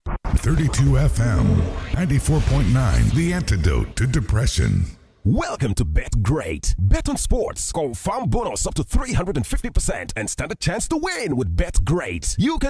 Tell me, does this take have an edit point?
yes; 1 cut; at 5.1 s

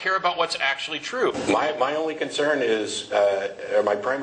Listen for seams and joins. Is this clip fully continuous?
no; 1 cut; at 1.4 s

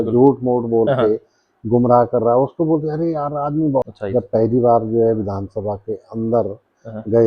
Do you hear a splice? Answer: yes; 1 cut; at 3.9 s

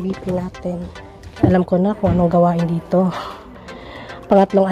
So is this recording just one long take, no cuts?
no; 1 cut; at 1.5 s

